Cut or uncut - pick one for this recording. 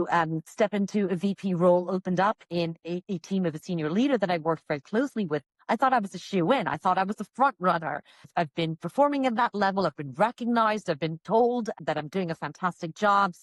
uncut